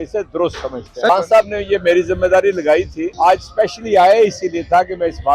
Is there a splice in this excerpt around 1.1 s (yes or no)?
yes